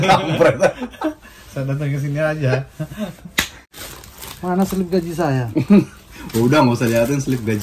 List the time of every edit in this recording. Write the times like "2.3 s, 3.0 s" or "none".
3.7 s